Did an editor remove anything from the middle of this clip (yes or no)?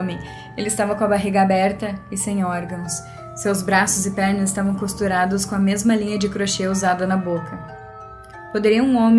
yes